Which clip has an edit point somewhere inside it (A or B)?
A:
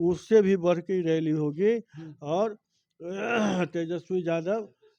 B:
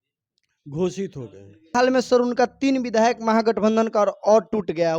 B